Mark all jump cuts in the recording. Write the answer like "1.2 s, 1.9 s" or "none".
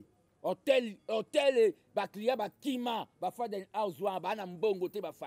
none